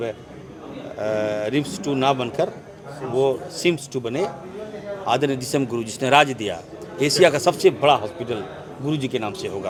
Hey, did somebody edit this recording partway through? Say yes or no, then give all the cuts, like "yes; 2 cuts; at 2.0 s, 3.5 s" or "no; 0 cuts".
no; 0 cuts